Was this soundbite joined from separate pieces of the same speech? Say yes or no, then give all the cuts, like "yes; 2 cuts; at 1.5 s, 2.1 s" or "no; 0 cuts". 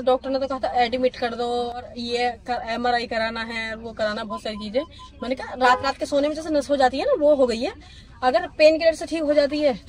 no; 0 cuts